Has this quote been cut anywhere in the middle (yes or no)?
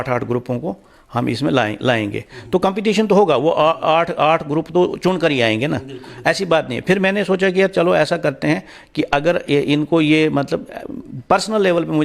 no